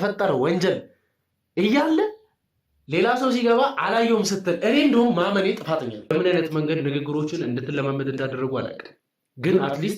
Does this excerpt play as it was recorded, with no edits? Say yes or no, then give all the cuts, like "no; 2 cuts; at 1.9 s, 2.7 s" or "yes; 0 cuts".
no; 1 cut; at 6.1 s